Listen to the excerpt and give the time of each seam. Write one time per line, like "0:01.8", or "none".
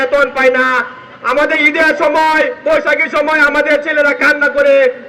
none